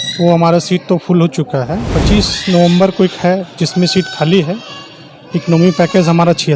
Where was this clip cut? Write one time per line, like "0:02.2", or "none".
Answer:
0:01.9